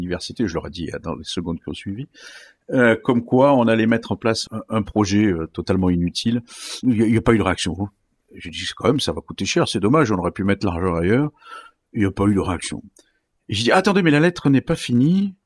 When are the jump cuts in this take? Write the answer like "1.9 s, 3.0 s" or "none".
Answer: 4.4 s